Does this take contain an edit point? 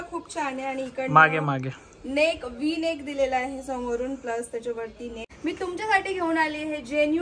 yes; 1 cut; at 5.2 s

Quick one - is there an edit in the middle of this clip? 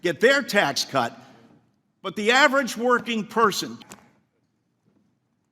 yes; 1 cut; at 3.7 s

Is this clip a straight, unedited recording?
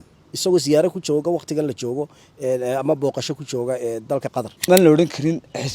no; 1 cut; at 4.6 s

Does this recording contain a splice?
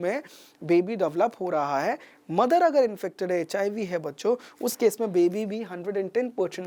no; 0 cuts

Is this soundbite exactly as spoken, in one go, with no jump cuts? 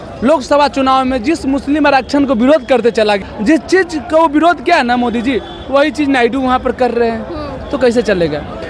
no; 1 cut; at 3.2 s

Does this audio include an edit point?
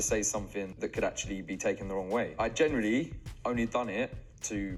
no; 0 cuts

